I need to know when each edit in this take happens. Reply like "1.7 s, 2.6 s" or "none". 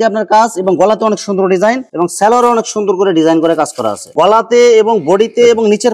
4.0 s

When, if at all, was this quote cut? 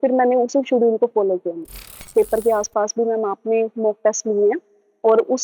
2.1 s

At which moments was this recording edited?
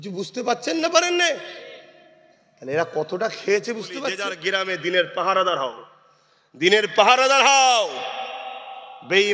4.3 s

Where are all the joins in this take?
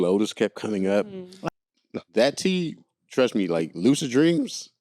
1.3 s

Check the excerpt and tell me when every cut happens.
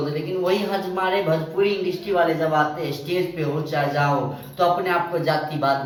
none

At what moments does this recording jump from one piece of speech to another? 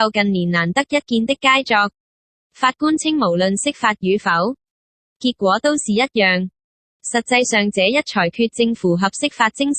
5.1 s

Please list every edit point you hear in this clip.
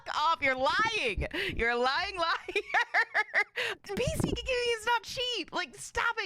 3.7 s

